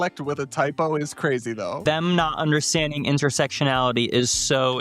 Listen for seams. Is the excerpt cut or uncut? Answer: cut